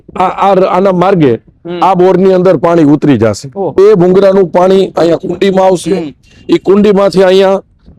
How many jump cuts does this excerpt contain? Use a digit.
1